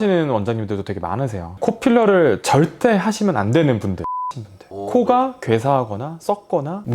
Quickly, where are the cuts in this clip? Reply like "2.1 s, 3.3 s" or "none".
1.5 s, 4.1 s

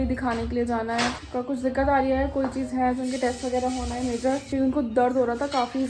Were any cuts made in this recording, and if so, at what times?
1.2 s, 4.4 s

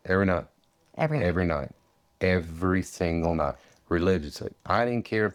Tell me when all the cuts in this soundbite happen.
none

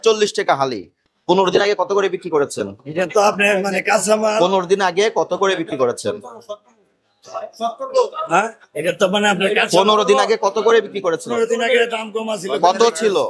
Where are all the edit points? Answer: none

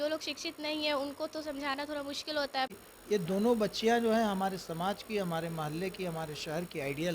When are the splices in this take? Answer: 2.7 s

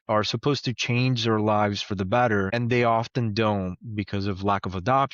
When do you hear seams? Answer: 2.5 s

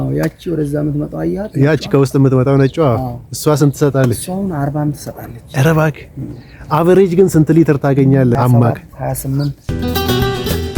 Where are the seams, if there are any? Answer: 8.4 s, 9.7 s

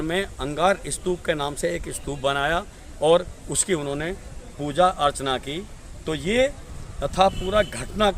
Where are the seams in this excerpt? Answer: none

